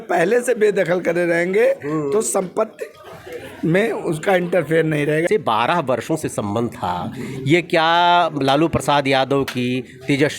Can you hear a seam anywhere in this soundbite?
yes; 1 cut; at 5.3 s

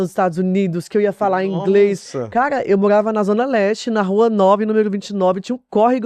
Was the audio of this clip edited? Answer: no; 0 cuts

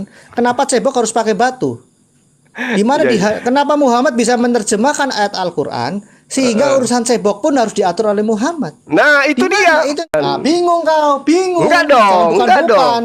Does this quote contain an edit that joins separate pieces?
yes; 1 cut; at 10.1 s

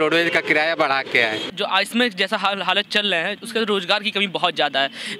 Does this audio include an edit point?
yes; 1 cut; at 1.4 s

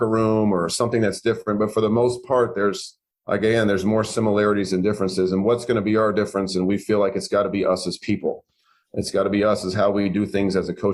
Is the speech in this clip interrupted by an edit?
no; 0 cuts

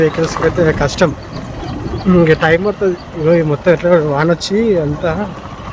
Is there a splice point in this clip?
no; 0 cuts

